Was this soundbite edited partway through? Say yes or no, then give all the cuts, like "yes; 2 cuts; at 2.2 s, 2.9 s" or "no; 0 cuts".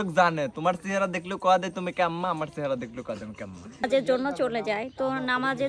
yes; 1 cut; at 3.8 s